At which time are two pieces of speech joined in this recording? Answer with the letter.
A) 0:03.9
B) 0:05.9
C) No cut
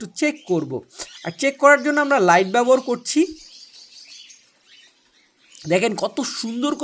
C